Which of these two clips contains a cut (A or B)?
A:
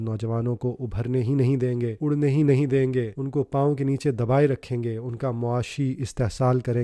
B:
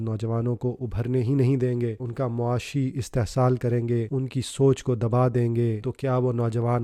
B